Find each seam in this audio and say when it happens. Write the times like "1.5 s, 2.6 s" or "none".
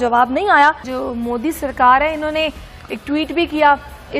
0.9 s